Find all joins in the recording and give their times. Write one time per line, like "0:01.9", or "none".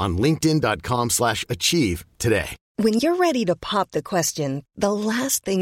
0:02.6